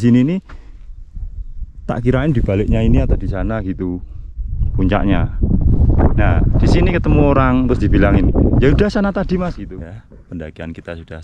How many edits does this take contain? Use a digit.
1